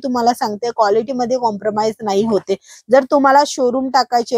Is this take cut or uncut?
uncut